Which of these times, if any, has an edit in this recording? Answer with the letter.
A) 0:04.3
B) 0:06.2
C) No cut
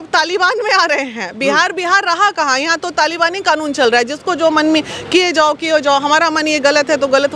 C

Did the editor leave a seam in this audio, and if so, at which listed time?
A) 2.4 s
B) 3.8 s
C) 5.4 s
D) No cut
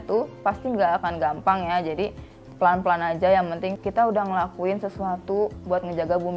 B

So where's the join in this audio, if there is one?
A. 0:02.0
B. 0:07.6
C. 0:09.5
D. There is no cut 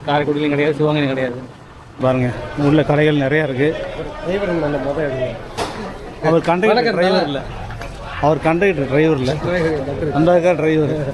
A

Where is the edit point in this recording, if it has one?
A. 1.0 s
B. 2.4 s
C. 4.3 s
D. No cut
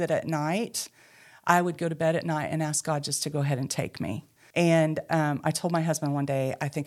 C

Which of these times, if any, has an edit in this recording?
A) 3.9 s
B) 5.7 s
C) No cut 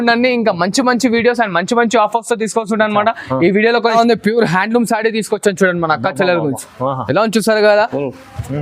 A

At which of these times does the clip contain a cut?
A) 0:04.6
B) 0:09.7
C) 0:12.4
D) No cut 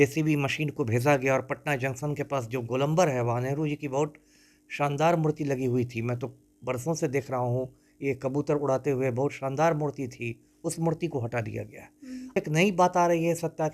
C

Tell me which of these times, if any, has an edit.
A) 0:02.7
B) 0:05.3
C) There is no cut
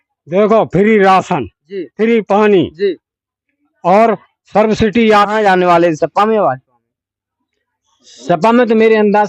B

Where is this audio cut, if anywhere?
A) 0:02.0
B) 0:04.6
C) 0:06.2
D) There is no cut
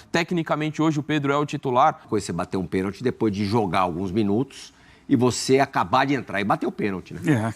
A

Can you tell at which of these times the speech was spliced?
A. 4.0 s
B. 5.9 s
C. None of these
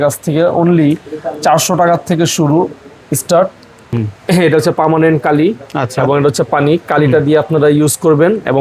A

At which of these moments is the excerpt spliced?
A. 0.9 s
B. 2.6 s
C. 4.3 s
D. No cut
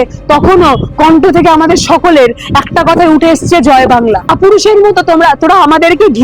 C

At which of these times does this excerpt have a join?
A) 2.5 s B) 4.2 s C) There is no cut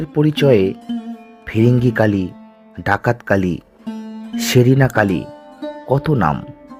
C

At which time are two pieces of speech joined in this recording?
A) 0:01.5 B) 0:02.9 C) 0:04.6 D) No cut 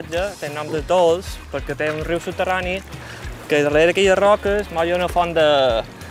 D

